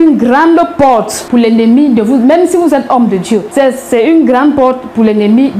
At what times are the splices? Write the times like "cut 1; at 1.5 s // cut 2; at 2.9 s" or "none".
cut 1; at 1.2 s // cut 2; at 3.5 s